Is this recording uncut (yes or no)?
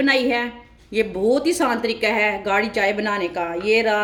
yes